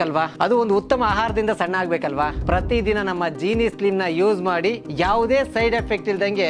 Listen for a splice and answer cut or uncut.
uncut